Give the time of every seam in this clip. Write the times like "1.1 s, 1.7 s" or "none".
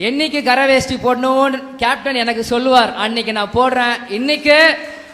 none

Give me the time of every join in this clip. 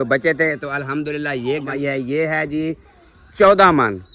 1.7 s

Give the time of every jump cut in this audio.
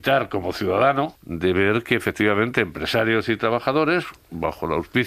1.2 s

